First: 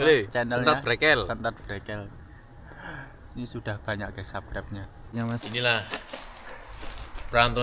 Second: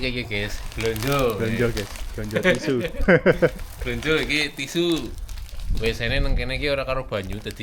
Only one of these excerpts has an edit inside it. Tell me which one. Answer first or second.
first